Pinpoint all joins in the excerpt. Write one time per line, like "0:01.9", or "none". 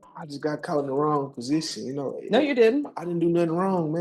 none